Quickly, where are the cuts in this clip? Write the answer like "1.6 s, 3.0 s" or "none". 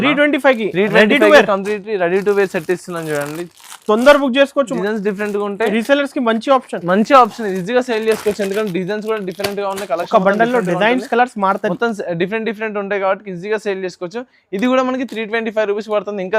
4.7 s